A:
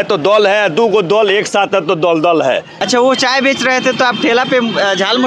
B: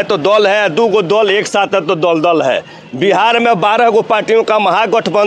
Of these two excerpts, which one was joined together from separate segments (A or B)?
A